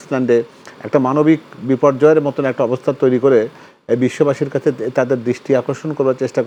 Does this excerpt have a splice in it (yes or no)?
no